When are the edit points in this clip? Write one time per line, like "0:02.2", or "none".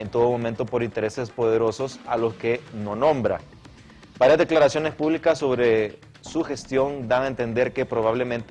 none